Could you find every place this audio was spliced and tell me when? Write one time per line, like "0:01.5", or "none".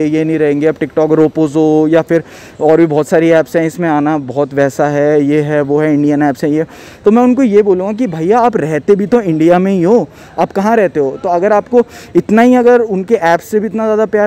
none